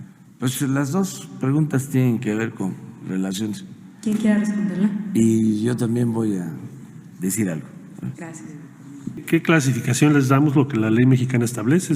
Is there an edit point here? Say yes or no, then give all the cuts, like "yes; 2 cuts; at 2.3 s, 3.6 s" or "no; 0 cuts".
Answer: yes; 1 cut; at 9.2 s